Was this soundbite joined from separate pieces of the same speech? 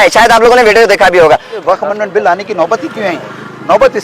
yes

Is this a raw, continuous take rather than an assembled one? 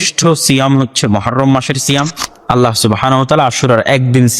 no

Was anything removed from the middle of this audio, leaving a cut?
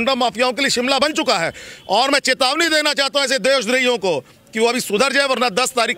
no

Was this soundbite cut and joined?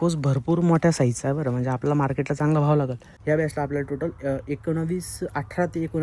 yes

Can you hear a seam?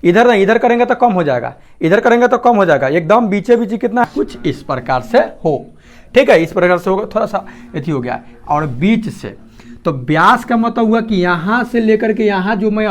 yes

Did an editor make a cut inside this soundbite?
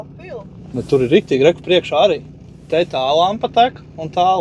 no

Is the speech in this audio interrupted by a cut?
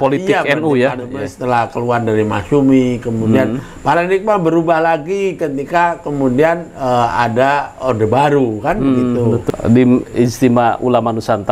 yes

